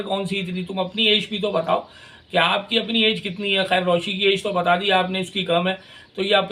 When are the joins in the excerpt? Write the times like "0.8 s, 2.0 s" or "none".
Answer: none